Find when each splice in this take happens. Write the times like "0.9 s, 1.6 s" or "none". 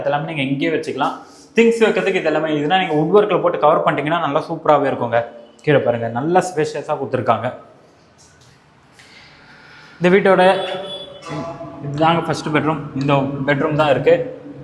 none